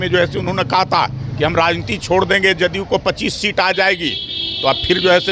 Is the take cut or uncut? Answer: uncut